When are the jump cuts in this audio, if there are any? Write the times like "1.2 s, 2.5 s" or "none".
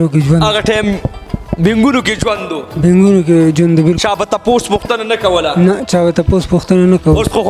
none